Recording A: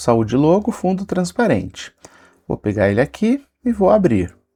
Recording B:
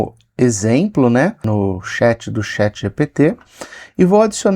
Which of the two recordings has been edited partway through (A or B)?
B